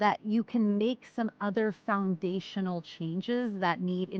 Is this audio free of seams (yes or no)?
yes